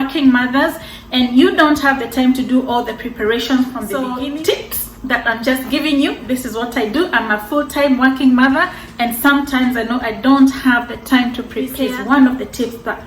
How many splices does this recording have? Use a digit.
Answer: 2